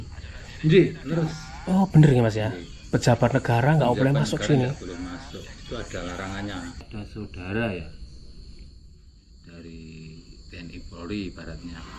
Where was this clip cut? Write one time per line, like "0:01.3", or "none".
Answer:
0:06.8

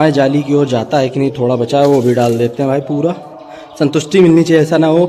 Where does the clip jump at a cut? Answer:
none

